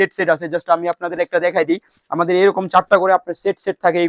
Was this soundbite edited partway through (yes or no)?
no